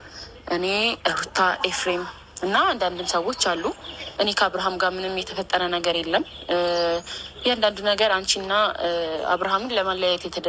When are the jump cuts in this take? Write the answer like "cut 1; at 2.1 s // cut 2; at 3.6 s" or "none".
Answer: cut 1; at 4.0 s